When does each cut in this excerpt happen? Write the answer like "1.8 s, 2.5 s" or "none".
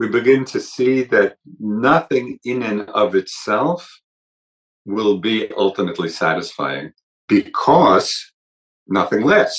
none